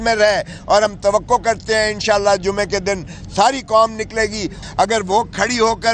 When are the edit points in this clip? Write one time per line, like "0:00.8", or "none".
0:04.5